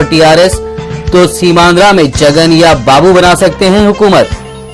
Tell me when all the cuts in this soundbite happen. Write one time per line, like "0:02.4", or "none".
none